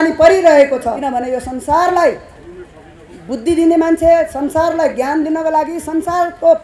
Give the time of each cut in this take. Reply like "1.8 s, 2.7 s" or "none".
1.0 s